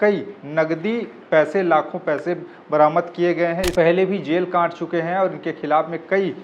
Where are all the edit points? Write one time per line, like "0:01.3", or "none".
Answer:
0:03.7

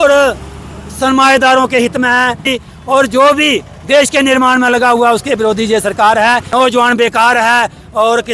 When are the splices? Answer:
0:02.6
0:06.5

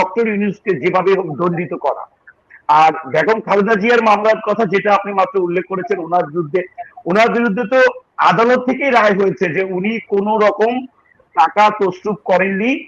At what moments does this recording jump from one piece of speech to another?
none

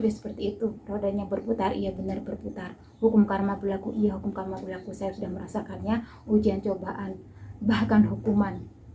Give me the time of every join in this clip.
none

